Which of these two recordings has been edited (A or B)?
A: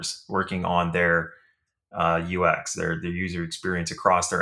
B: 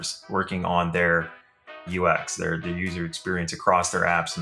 B